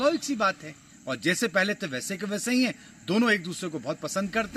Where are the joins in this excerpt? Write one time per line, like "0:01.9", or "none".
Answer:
none